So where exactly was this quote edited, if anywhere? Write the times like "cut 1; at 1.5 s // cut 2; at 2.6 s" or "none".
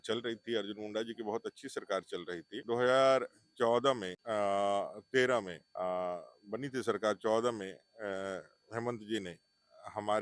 cut 1; at 2.5 s // cut 2; at 4.1 s // cut 3; at 5.6 s